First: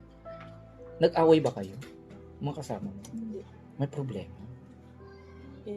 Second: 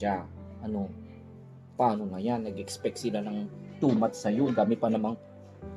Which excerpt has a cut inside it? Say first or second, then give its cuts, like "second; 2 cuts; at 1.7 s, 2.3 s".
first; 1 cut; at 3.5 s